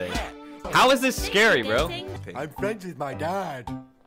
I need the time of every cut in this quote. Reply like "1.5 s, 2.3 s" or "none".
2.2 s